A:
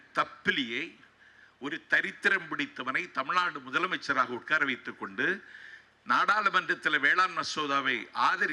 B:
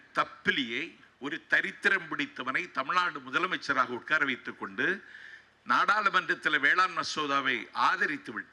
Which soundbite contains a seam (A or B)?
B